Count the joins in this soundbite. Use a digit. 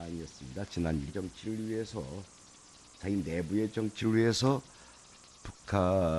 0